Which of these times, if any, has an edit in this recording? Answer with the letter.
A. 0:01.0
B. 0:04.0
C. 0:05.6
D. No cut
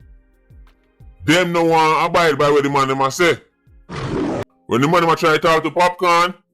B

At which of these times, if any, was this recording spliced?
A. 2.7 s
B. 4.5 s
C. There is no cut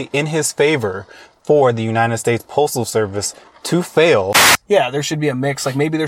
B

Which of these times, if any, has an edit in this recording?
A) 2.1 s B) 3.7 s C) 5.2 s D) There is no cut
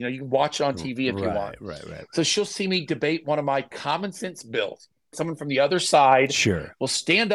C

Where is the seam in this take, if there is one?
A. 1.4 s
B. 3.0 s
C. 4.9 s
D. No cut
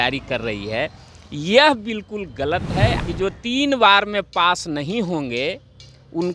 B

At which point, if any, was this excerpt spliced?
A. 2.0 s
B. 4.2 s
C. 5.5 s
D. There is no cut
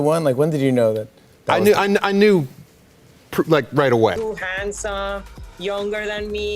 B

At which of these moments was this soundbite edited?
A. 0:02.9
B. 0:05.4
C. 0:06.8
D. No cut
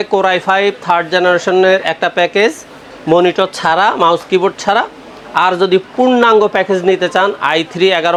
D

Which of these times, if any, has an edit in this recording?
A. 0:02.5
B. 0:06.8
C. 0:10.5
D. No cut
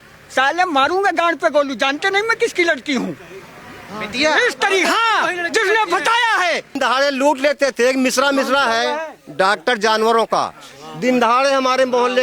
B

